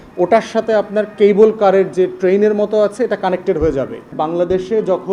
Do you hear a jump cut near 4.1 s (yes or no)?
yes